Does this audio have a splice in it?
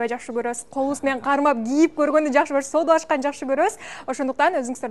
no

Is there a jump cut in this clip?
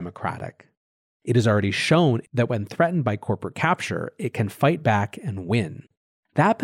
yes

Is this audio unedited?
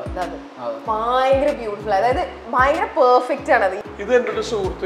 no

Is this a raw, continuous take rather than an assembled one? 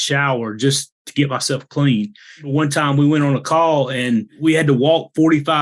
no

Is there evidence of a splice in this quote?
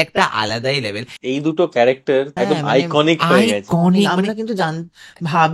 yes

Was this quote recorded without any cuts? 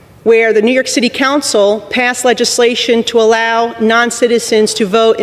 yes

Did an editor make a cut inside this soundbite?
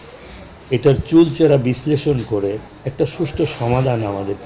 yes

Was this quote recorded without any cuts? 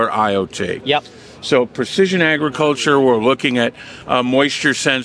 yes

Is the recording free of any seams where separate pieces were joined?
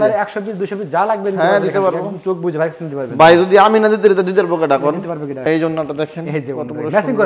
no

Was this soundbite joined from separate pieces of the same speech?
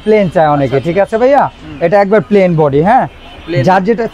no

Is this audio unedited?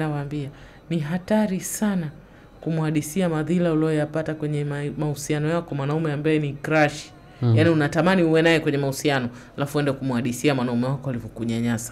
yes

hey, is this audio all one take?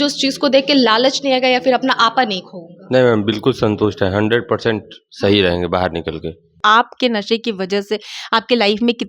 no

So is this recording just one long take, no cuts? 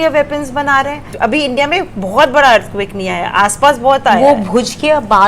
no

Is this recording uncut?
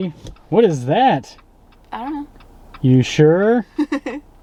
yes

